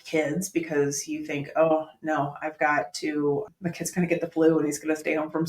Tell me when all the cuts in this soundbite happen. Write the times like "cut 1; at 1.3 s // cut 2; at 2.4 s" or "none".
cut 1; at 3.5 s